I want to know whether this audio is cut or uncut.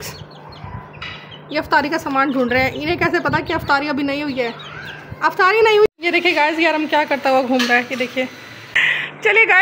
cut